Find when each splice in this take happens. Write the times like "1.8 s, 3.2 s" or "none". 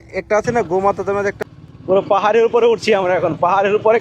1.4 s